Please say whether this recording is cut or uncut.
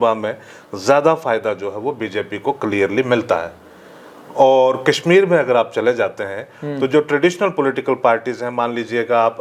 uncut